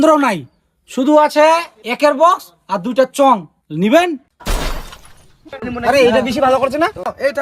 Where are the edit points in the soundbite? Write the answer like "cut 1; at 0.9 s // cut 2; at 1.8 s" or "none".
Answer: cut 1; at 1.8 s // cut 2; at 3.6 s // cut 3; at 5.6 s